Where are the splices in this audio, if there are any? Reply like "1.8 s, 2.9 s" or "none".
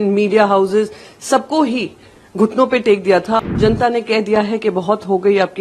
3.4 s

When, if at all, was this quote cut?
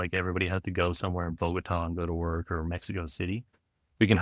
none

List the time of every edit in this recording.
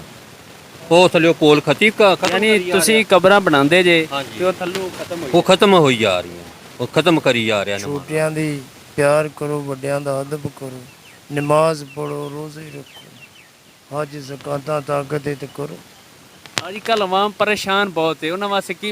7.8 s

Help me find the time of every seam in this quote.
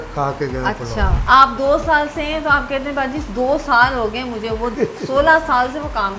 1.2 s, 4.7 s

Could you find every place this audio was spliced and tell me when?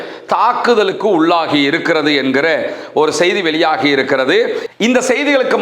4.6 s

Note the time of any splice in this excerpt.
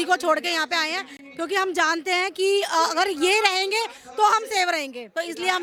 none

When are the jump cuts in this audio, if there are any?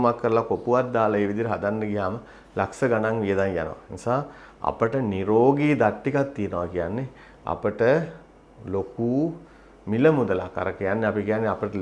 none

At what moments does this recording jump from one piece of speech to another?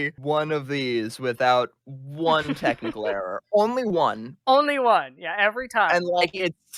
none

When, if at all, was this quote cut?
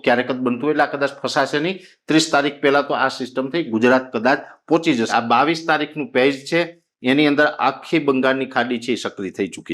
5.1 s

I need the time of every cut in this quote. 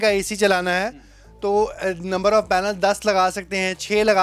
none

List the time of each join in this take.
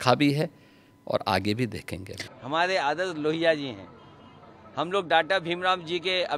2.2 s

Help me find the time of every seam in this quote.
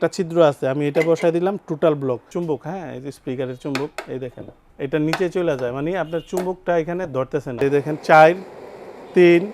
2.3 s, 4.6 s, 7.6 s

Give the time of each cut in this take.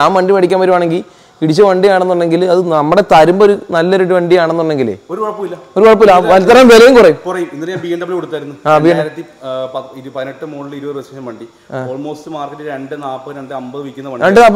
none

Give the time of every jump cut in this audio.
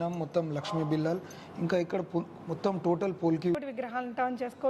3.6 s

